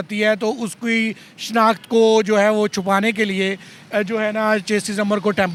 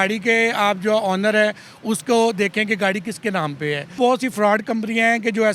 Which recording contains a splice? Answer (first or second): second